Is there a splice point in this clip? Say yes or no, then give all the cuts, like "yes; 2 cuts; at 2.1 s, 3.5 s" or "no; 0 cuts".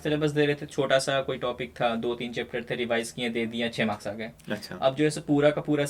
no; 0 cuts